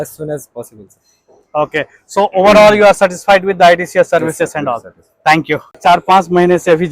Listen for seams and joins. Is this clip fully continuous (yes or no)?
no